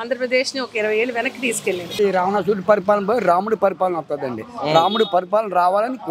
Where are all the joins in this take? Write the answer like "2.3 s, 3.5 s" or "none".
1.9 s